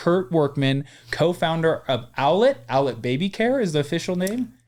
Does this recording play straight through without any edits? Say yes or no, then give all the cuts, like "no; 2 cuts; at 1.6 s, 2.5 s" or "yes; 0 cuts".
yes; 0 cuts